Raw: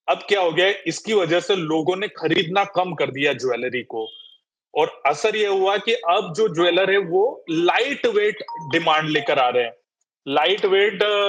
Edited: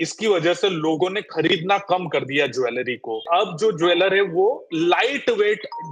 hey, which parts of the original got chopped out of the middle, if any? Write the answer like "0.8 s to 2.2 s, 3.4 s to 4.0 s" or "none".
4.1 s to 6.0 s